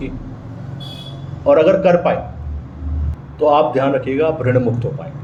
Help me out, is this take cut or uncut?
uncut